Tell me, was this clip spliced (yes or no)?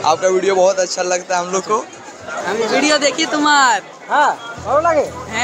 yes